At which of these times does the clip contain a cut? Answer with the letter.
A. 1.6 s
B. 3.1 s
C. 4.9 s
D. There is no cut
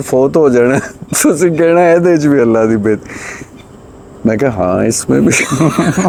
D